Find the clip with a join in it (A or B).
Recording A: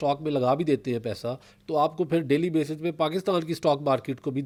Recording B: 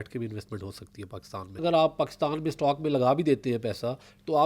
B